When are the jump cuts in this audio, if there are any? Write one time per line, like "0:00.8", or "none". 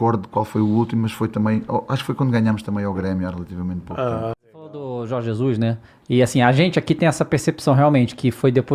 0:04.8